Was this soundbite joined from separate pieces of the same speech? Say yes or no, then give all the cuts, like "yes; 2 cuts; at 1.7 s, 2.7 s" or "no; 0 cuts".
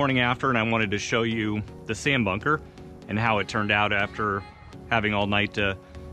no; 0 cuts